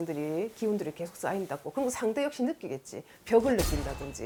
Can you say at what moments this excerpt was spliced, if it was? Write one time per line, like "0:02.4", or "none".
none